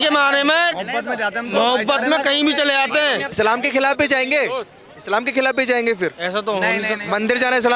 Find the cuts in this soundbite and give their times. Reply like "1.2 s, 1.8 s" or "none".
3.3 s